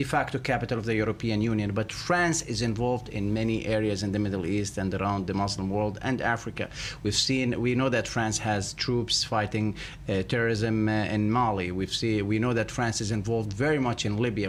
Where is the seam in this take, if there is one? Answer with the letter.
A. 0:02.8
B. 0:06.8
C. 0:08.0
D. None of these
D